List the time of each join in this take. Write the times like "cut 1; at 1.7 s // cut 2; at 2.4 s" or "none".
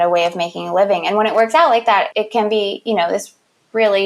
cut 1; at 2.1 s